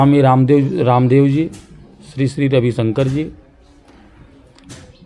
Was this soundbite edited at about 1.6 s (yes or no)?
no